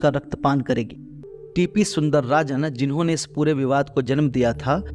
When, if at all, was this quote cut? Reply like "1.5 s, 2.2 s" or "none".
1.3 s